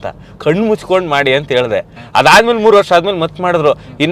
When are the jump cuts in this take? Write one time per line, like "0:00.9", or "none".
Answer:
none

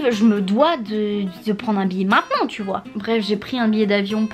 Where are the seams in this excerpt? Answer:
0:03.0

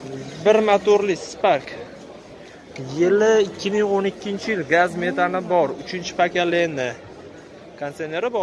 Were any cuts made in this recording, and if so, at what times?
none

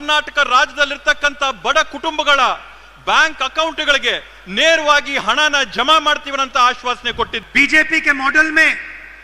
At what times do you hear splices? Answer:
0:07.4

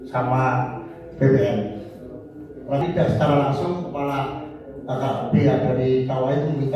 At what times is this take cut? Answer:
0:02.8

